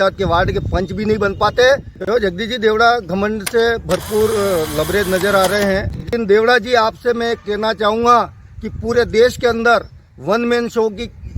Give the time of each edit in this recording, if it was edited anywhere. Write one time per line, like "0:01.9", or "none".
0:01.9
0:06.1